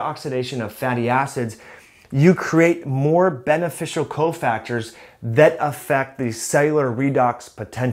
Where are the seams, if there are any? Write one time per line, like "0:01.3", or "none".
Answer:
none

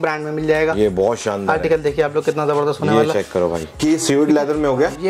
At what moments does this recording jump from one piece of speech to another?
0:03.8

